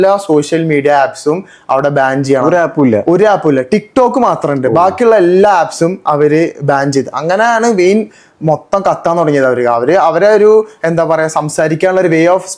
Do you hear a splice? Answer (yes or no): no